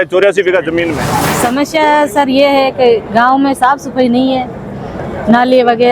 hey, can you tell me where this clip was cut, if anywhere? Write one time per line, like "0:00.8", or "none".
0:01.0